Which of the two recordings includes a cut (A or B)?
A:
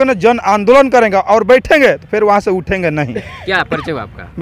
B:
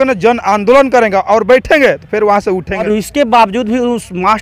B